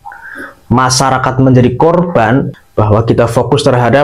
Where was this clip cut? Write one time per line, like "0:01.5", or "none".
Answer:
0:02.5